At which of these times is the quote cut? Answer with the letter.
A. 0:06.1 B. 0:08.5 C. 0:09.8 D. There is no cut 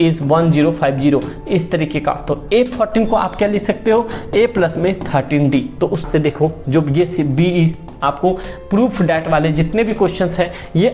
A